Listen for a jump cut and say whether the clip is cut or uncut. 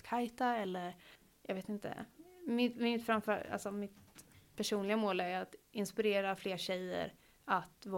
uncut